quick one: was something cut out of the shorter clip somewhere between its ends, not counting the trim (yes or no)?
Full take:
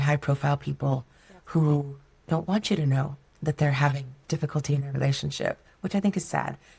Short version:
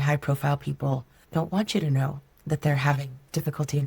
yes